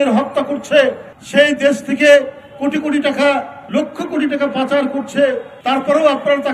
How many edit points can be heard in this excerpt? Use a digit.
3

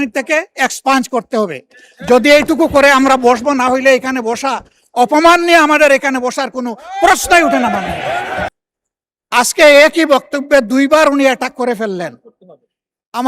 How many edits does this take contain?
1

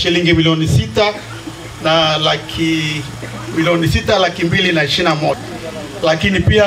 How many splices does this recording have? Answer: 1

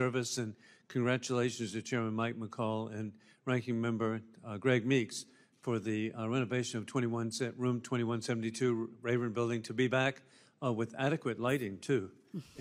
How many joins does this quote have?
2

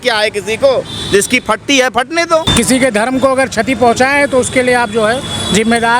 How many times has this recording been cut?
1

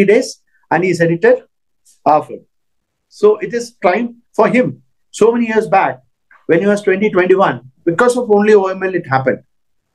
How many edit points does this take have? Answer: 1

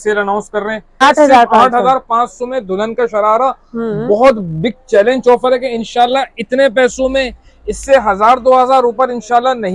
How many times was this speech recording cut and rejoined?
1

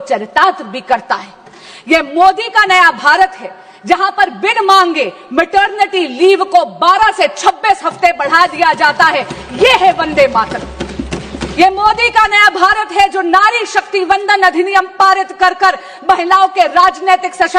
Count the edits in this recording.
0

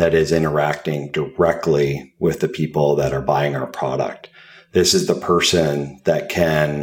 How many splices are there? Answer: 1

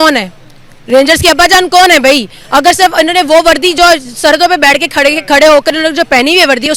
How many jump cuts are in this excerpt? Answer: 0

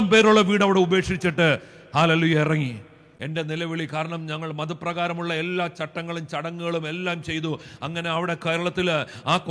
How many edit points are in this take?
1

